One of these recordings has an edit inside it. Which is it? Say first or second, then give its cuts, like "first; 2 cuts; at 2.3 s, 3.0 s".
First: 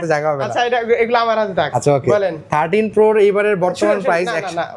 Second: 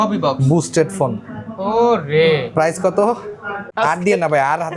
second; 1 cut; at 3.6 s